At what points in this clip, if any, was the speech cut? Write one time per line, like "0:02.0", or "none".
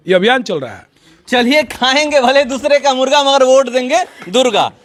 none